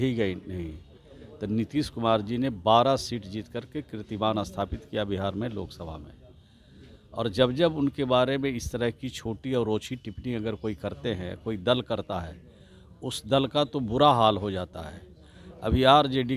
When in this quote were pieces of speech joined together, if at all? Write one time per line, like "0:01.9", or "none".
none